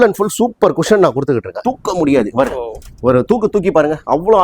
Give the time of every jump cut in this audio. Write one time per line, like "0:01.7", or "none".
0:01.6